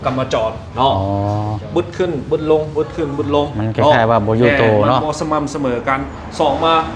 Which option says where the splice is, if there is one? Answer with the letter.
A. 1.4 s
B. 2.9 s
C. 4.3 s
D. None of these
D